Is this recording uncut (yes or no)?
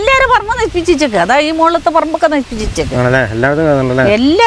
yes